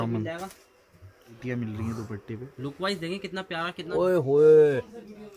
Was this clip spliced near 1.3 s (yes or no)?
yes